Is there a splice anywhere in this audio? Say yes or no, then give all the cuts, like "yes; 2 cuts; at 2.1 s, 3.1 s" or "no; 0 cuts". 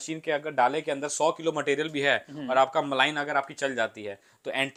no; 0 cuts